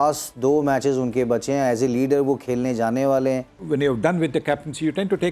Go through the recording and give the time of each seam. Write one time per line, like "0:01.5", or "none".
0:03.6